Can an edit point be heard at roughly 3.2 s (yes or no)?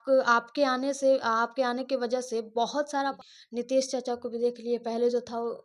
yes